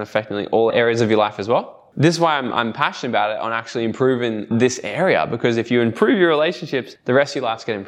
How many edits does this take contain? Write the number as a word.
two